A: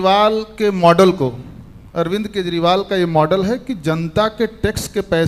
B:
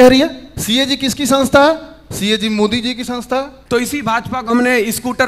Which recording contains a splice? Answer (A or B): B